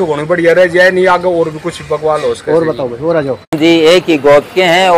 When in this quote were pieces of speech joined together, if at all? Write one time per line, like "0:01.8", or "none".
0:03.6